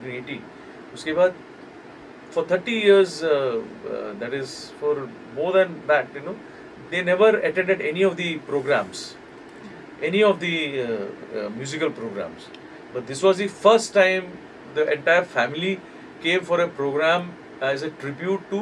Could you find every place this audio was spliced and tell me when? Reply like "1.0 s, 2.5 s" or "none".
none